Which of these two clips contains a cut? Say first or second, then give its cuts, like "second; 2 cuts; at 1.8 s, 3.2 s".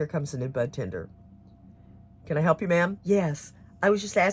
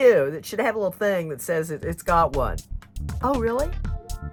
first; 1 cut; at 3.0 s